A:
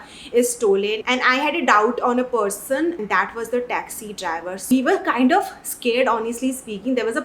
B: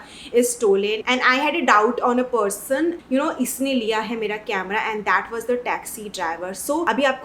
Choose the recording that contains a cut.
A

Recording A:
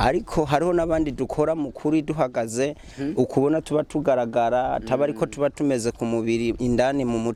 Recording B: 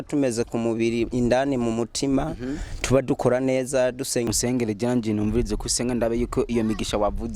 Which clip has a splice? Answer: B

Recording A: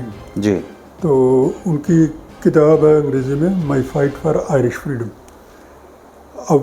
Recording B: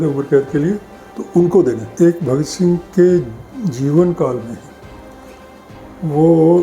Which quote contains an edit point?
B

